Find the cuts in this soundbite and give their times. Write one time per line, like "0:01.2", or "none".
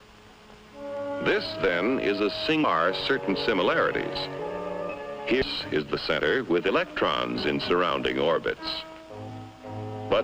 none